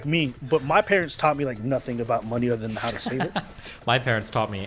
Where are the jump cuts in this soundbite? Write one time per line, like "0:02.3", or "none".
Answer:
none